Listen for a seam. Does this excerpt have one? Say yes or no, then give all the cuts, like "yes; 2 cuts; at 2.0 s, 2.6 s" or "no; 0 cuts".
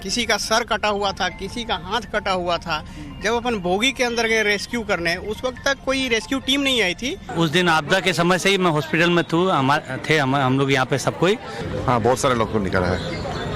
yes; 3 cuts; at 7.3 s, 9.9 s, 11.6 s